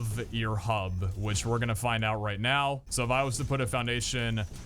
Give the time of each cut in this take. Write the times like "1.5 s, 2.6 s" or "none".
2.9 s